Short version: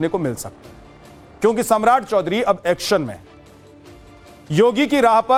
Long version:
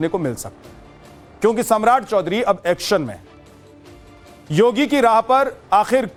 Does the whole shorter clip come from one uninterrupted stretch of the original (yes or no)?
yes